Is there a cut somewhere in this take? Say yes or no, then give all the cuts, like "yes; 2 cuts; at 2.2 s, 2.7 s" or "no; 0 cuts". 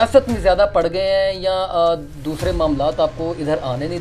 no; 0 cuts